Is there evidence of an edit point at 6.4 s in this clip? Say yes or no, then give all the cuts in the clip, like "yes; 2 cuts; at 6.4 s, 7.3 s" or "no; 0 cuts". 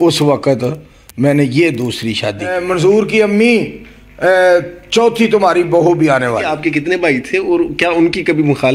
yes; 2 cuts; at 2.6 s, 6.4 s